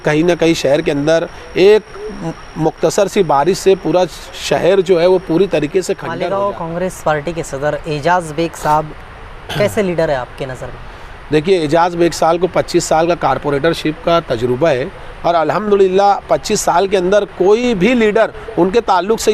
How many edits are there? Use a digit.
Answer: 1